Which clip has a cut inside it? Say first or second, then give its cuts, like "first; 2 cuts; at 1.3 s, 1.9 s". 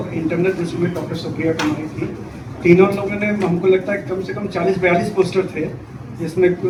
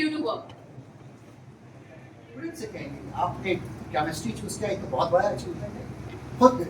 second; 1 cut; at 2.4 s